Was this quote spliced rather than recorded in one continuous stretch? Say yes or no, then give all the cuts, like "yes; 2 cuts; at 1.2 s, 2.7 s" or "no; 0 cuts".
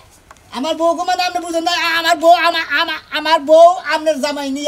no; 0 cuts